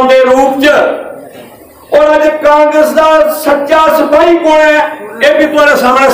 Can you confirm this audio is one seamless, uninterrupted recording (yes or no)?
yes